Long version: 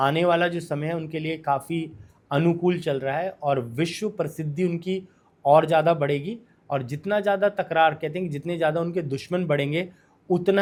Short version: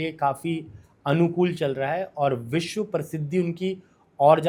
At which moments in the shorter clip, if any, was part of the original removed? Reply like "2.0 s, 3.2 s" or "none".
none